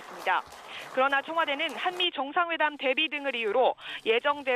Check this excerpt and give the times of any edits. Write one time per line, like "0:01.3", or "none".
0:01.7